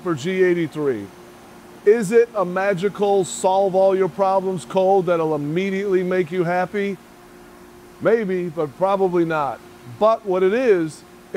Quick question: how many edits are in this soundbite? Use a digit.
0